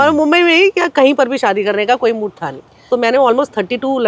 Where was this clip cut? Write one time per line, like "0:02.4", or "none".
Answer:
0:02.9